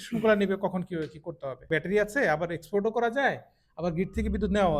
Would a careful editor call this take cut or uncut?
cut